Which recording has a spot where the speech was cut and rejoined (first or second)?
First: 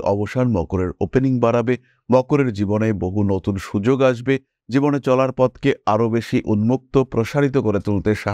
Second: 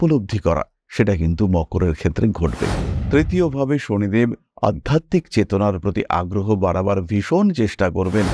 second